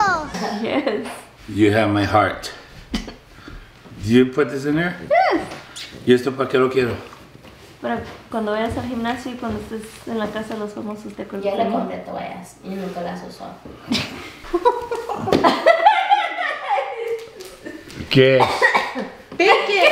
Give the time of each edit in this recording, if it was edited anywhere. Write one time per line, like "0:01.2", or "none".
0:14.4